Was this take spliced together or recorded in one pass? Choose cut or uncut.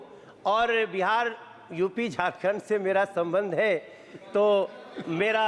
uncut